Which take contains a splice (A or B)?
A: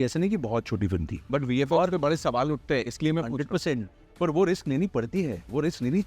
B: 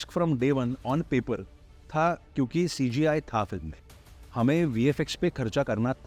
A